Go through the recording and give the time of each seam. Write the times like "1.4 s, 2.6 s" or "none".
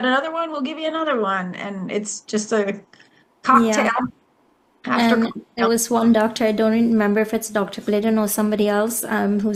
none